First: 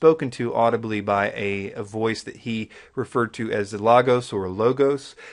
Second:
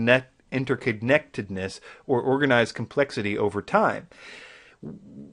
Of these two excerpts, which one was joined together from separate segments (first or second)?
second